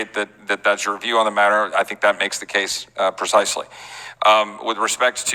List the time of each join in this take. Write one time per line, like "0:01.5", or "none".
none